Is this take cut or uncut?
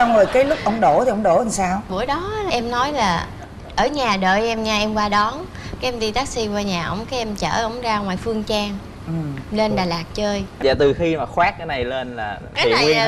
cut